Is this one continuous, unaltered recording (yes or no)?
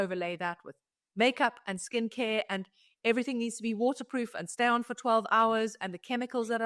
yes